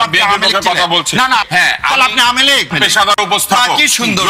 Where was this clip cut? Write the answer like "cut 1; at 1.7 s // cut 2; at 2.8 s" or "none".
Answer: cut 1; at 1.4 s // cut 2; at 2.7 s